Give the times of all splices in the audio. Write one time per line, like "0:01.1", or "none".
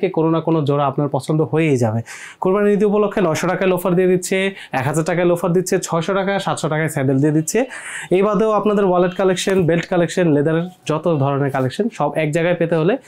none